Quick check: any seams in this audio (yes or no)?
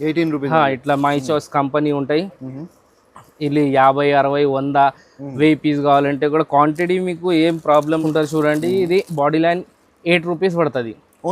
yes